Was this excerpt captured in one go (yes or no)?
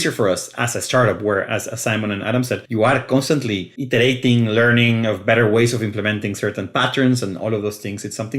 no